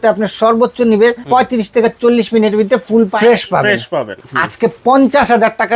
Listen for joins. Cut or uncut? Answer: cut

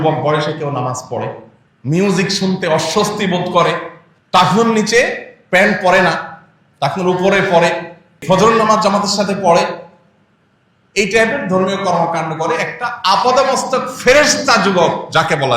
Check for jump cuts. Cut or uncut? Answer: uncut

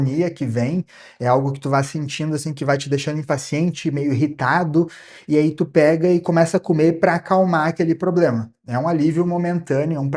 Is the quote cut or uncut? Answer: uncut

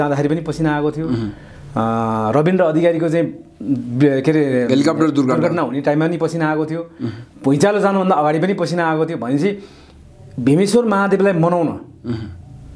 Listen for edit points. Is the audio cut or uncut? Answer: uncut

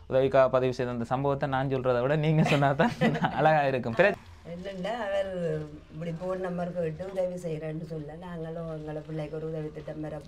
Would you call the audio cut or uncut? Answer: cut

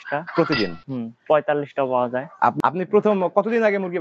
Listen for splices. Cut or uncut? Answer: cut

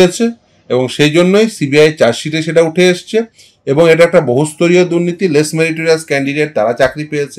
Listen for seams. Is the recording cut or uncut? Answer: uncut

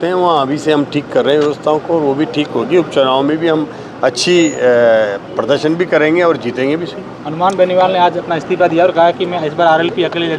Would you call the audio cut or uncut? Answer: uncut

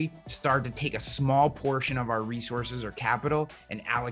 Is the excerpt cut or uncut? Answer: uncut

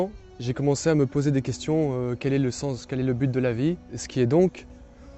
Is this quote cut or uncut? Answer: cut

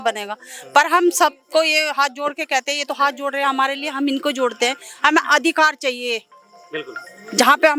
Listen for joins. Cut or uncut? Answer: uncut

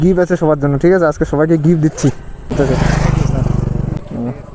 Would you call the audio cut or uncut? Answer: cut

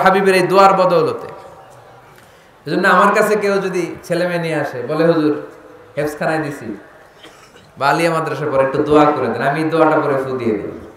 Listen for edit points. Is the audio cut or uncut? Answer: uncut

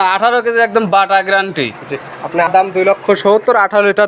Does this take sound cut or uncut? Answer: cut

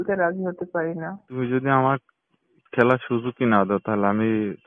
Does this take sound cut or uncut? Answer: cut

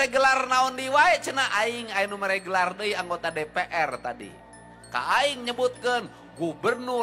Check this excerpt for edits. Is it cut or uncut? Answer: uncut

